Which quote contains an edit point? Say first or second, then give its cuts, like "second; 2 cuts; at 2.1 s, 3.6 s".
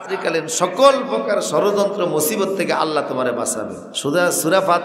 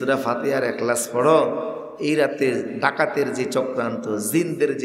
first; 1 cut; at 3.9 s